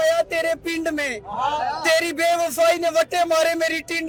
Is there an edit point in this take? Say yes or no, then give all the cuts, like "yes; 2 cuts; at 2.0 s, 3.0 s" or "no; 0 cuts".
no; 0 cuts